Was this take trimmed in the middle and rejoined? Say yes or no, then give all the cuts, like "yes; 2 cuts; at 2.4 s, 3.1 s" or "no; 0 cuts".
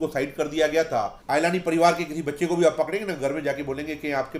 yes; 1 cut; at 1.2 s